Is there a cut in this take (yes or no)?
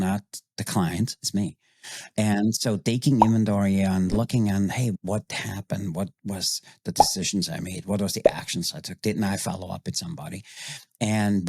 yes